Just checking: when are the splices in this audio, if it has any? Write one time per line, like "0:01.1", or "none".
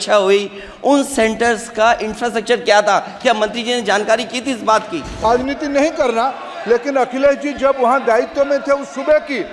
0:05.2